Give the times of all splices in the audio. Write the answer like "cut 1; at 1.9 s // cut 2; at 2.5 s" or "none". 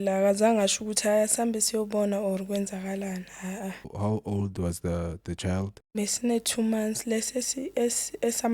cut 1; at 3.9 s // cut 2; at 5.8 s